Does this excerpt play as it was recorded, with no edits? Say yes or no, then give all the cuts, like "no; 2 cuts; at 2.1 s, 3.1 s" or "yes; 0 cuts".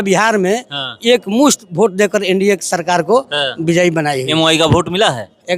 yes; 0 cuts